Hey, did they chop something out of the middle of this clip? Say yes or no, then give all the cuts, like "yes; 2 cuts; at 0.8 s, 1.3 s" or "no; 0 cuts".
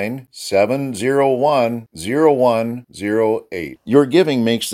no; 0 cuts